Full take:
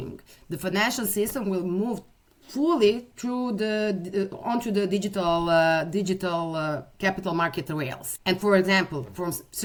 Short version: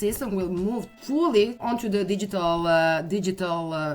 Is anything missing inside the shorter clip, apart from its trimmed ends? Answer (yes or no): yes